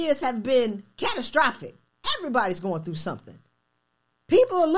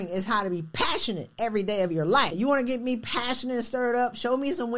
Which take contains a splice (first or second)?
second